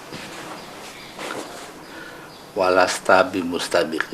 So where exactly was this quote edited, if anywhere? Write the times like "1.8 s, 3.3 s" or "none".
2.6 s

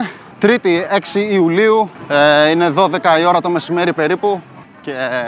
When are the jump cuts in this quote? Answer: none

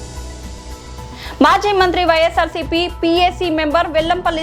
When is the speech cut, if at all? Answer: 1.1 s

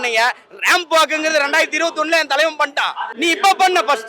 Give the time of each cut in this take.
3.1 s

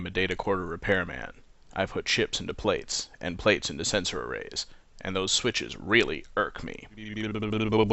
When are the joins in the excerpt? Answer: 2.6 s

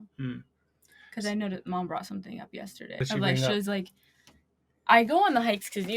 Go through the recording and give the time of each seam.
3.0 s

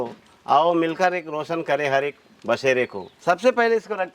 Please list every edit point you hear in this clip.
3.1 s

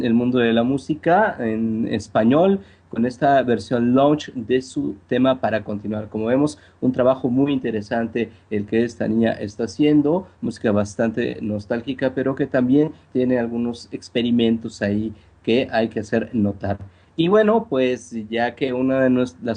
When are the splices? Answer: 7.1 s

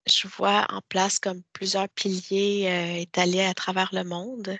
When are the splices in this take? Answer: none

